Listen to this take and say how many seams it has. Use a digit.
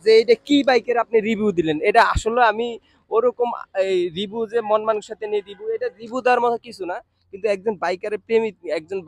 0